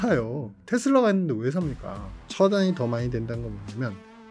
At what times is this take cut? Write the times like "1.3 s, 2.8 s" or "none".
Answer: 2.2 s